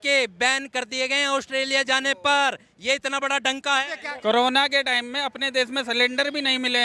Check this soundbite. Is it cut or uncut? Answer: cut